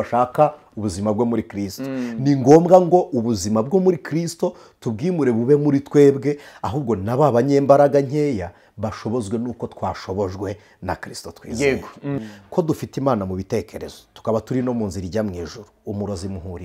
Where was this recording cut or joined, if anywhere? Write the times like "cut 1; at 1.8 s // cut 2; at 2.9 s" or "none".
cut 1; at 12.2 s